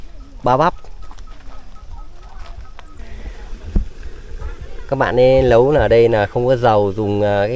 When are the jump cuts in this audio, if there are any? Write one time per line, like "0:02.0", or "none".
0:03.0